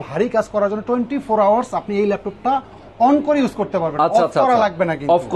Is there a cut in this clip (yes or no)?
no